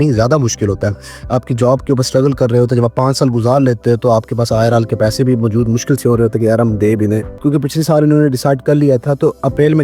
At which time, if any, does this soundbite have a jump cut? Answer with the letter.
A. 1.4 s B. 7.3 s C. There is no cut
B